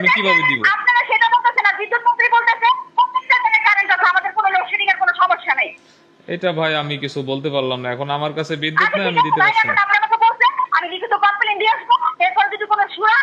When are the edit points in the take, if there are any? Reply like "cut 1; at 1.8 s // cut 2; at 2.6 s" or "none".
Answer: none